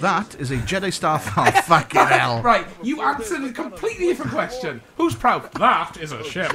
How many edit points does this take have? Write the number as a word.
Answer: zero